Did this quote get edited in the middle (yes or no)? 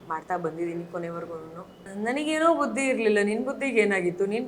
yes